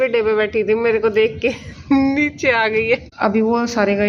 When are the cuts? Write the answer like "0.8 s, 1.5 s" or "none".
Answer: 3.1 s